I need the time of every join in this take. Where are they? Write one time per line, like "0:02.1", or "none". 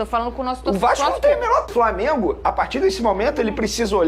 0:01.7